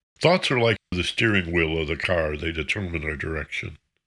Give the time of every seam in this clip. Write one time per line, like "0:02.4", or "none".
0:00.9

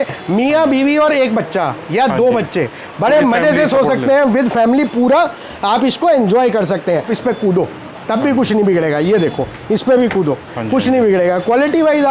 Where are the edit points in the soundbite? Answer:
0:07.1

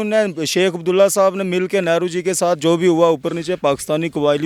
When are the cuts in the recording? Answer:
none

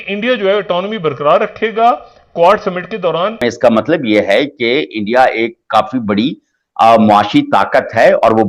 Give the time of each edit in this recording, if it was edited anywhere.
0:03.4

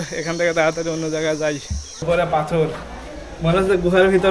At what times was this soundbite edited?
0:02.0

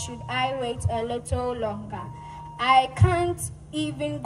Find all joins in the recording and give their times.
none

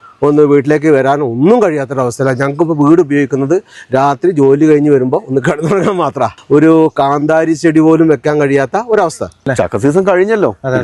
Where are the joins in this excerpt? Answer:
0:06.3
0:09.4

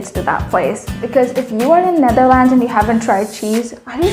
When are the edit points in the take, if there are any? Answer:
0:01.0

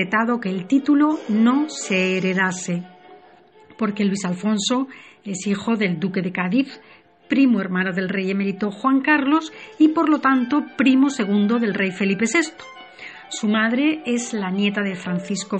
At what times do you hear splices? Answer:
0:06.4

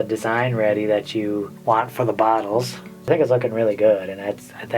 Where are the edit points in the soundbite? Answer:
0:01.5
0:03.1

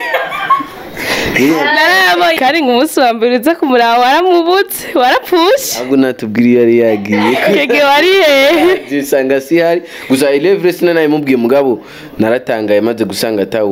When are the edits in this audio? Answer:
0:02.4

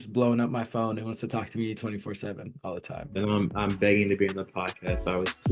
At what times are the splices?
none

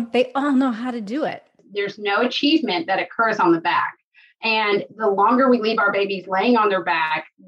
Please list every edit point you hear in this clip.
0:01.7

